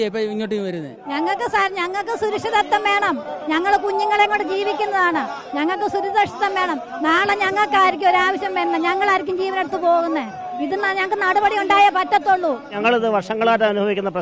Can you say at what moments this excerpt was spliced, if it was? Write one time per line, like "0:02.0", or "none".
0:01.0
0:12.7